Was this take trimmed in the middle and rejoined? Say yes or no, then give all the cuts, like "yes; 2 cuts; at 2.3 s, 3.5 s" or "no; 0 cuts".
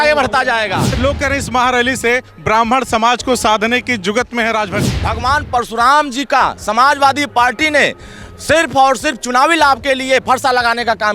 yes; 2 cuts; at 1.0 s, 4.9 s